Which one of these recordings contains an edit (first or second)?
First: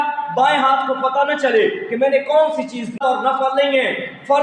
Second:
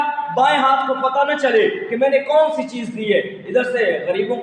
first